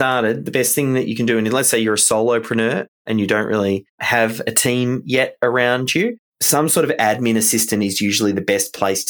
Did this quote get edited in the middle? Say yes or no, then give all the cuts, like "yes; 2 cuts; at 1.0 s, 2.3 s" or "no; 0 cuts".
yes; 1 cut; at 6.3 s